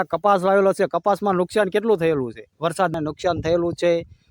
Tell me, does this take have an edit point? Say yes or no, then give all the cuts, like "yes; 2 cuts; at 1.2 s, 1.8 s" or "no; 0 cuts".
yes; 1 cut; at 2.9 s